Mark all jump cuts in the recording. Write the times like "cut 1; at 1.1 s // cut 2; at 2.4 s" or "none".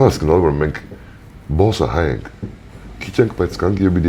none